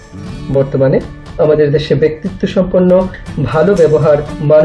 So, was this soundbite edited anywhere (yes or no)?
no